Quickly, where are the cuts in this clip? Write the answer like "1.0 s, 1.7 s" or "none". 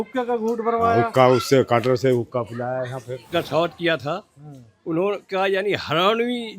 3.3 s

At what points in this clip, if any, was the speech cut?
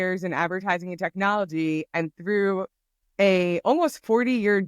none

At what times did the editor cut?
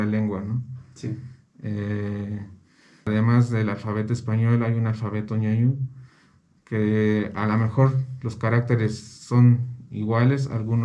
3.0 s

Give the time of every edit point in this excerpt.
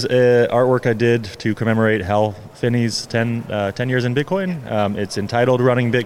none

